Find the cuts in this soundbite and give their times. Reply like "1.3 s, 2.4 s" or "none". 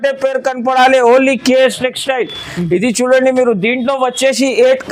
none